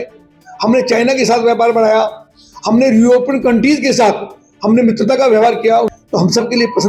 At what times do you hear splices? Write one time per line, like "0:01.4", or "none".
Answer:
0:05.9